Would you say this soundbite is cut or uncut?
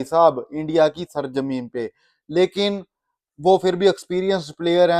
uncut